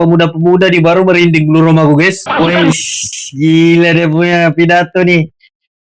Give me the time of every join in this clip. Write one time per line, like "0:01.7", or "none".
0:02.4